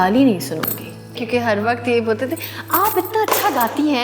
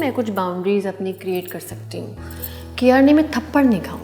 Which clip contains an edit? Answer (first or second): first